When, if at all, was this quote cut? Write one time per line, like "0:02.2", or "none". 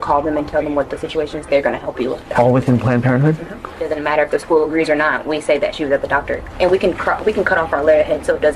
0:03.9
0:06.5